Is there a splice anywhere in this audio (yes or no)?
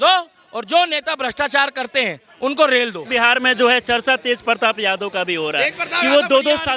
no